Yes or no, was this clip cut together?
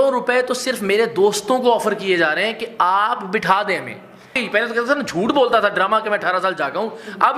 yes